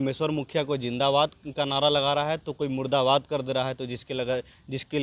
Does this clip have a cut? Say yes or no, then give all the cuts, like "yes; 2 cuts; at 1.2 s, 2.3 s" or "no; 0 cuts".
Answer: no; 0 cuts